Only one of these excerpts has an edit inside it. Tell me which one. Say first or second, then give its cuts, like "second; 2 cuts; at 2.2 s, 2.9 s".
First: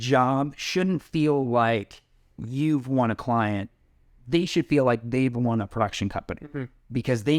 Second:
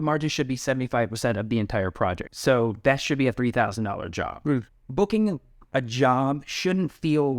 second; 2 cuts; at 2.2 s, 4.8 s